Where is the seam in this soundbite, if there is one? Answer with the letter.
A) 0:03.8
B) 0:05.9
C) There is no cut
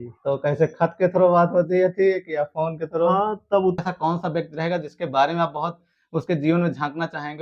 A